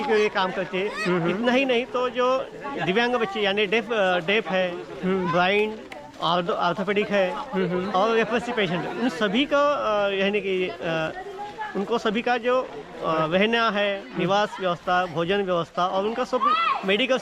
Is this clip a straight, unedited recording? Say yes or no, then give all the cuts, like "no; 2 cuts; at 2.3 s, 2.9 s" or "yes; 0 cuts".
yes; 0 cuts